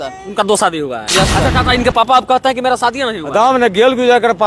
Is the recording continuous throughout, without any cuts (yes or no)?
no